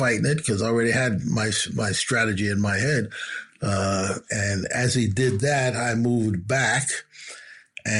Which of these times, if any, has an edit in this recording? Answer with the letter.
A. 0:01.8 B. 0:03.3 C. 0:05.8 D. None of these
D